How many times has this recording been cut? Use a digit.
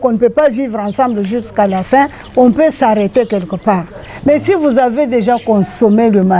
0